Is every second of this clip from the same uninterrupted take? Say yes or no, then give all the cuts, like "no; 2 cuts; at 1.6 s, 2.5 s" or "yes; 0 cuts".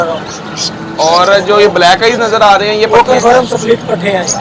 yes; 0 cuts